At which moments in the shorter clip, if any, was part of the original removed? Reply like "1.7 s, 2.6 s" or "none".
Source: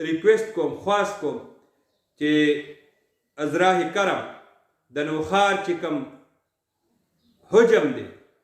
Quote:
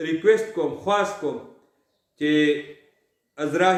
none